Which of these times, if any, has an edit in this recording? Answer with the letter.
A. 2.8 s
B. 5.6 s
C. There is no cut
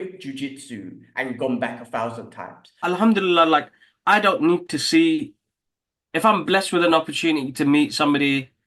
A